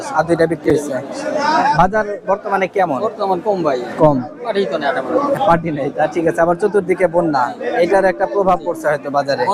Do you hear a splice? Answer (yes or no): no